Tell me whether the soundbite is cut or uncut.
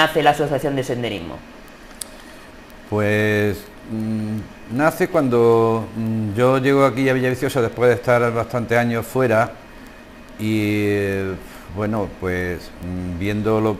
uncut